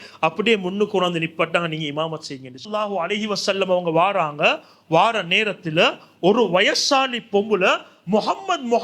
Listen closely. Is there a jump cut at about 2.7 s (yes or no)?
yes